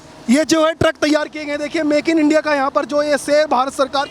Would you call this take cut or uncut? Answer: uncut